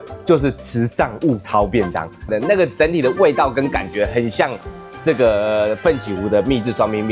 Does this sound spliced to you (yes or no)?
no